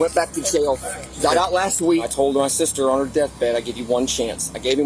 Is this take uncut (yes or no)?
no